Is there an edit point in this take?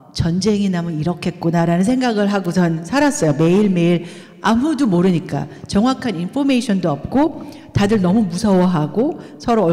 no; 0 cuts

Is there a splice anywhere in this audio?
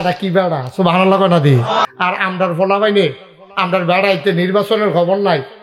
yes; 1 cut; at 1.9 s

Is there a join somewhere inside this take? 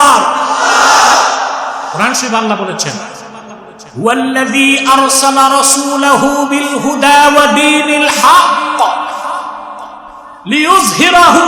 no; 0 cuts

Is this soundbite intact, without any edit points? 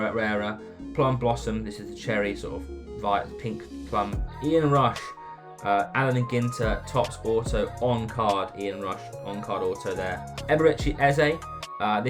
no; 2 cuts; at 4.3 s, 10.3 s

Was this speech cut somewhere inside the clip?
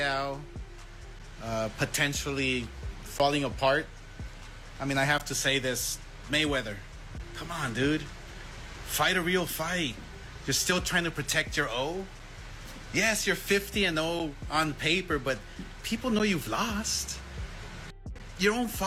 no; 0 cuts

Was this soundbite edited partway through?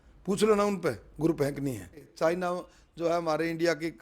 yes; 1 cut; at 2.1 s

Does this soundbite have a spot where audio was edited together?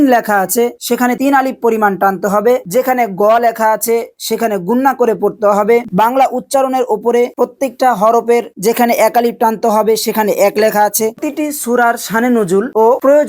yes; 3 cuts; at 2.6 s, 5.9 s, 11.2 s

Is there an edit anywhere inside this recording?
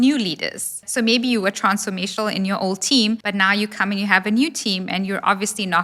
yes; 2 cuts; at 0.8 s, 3.2 s

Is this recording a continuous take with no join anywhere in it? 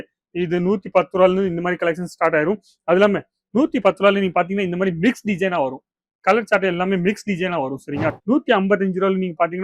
no; 1 cut; at 8.1 s

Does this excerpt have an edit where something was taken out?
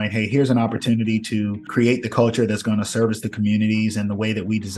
yes; 1 cut; at 1.6 s

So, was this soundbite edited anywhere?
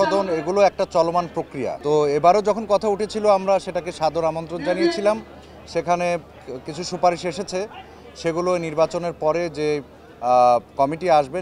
no; 0 cuts

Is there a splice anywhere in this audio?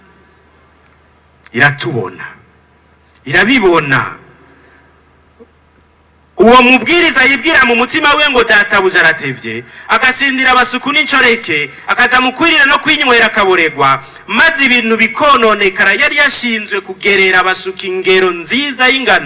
no; 0 cuts

